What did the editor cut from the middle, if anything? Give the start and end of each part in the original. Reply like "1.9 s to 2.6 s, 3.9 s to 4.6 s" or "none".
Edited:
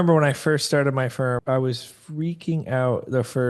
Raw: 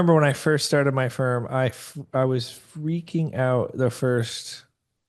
1.4 s to 2.1 s